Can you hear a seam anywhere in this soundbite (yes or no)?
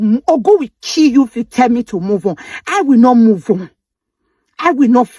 no